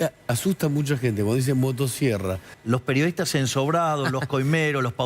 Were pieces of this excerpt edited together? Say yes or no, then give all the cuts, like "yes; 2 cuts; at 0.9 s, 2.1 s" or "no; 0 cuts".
yes; 1 cut; at 2.5 s